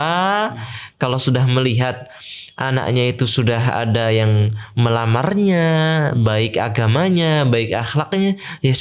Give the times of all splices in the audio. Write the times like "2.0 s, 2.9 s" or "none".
none